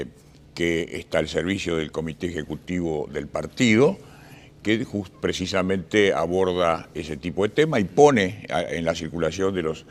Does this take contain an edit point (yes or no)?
no